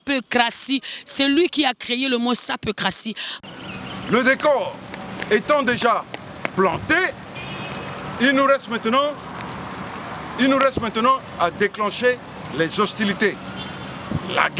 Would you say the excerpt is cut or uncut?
cut